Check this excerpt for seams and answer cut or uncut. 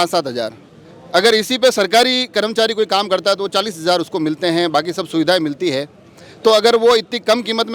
uncut